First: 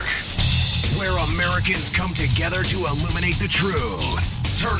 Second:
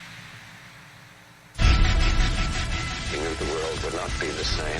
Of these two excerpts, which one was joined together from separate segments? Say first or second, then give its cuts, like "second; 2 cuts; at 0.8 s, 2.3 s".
second; 1 cut; at 1.5 s